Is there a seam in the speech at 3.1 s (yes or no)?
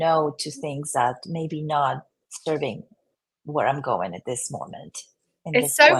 no